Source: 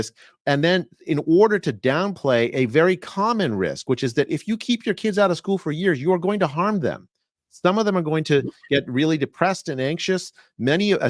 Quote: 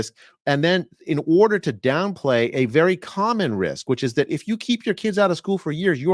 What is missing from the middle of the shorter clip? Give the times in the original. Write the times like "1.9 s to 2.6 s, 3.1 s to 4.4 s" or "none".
none